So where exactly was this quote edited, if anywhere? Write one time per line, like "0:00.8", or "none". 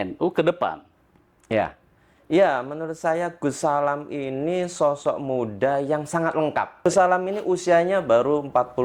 0:06.9